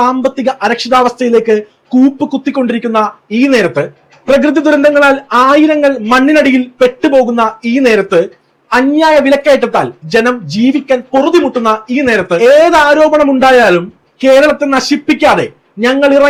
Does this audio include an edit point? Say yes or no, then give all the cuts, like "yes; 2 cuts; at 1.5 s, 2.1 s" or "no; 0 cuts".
no; 0 cuts